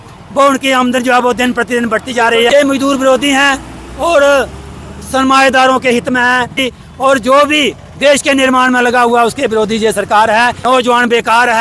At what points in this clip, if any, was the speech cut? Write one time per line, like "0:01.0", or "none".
0:02.5
0:06.7
0:10.6